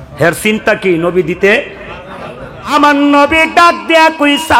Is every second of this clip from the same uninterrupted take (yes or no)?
no